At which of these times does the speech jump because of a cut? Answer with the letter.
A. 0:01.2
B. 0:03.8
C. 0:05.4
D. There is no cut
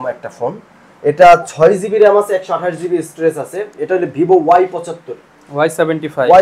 D